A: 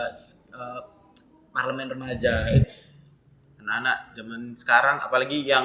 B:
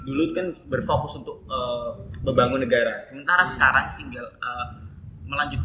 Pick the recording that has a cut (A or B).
A